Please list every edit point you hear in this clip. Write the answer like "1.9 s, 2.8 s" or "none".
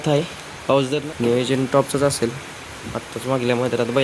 1.0 s